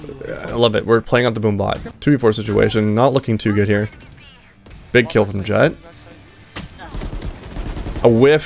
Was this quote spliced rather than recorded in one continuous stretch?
yes; 1 cut; at 1.9 s

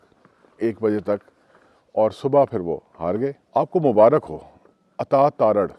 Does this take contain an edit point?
yes; 1 cut; at 3.4 s

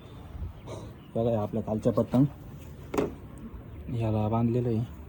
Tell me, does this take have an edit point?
no; 0 cuts

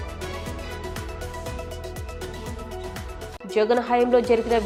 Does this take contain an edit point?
no; 0 cuts

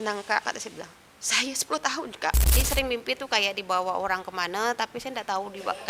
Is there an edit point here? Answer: yes; 1 cut; at 2.5 s

